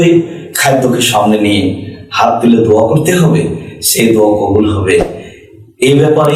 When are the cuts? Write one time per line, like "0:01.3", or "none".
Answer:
none